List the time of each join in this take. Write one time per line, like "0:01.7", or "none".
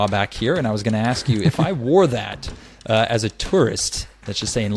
none